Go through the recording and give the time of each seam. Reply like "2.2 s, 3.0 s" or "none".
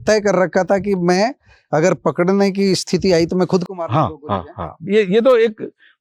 none